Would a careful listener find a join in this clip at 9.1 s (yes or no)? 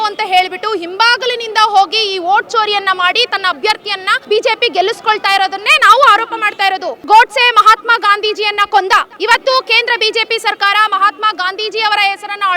yes